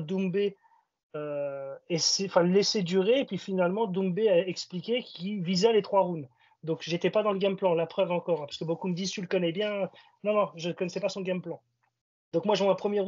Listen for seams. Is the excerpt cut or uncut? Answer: uncut